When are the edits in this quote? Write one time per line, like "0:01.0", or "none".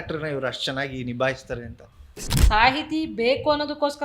0:02.3